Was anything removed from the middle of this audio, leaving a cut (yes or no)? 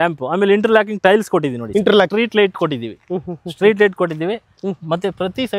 yes